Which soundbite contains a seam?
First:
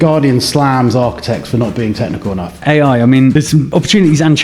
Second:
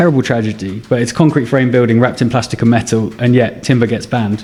first; 2 cuts; at 2.6 s, 3.6 s

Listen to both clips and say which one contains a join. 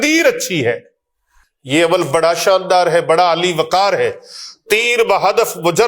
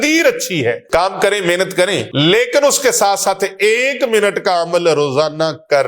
second; 2 cuts; at 0.8 s, 2.1 s

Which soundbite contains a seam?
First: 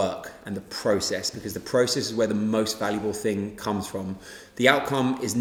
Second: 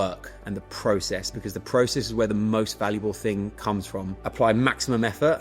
second; 1 cut; at 4.2 s

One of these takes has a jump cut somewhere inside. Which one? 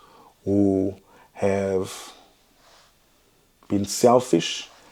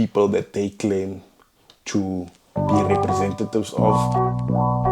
second; 1 cut; at 3.9 s

